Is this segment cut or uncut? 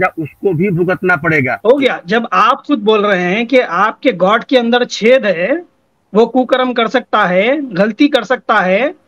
cut